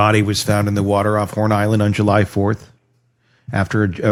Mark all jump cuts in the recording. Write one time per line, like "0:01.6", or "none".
none